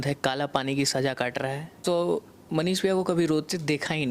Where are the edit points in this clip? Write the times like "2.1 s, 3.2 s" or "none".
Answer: 1.8 s